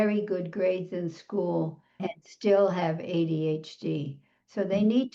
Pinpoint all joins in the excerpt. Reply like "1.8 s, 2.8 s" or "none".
2.0 s